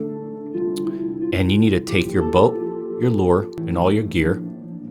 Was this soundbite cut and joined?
yes; 1 cut; at 3.6 s

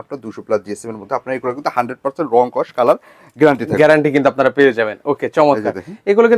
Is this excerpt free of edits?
yes; 0 cuts

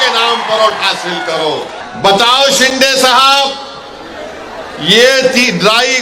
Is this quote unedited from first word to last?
no; 1 cut; at 1.8 s

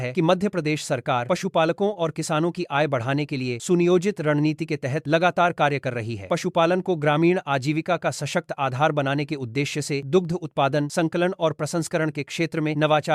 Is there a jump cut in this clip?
no; 0 cuts

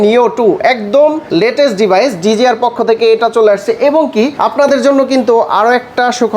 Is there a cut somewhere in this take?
yes; 2 cuts; at 1.2 s, 4.4 s

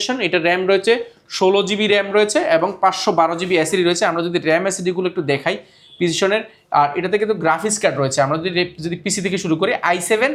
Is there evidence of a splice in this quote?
no; 0 cuts

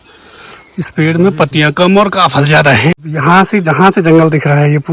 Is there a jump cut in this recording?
yes; 1 cut; at 3.0 s

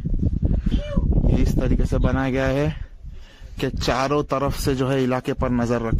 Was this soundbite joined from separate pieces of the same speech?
no; 0 cuts

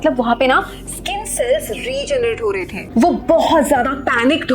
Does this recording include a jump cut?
yes; 1 cut; at 2.8 s

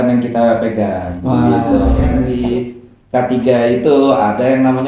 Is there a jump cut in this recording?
yes; 1 cut; at 2.3 s

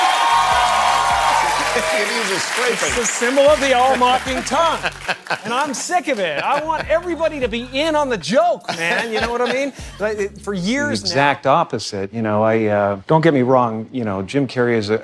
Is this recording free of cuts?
no; 1 cut; at 11.0 s

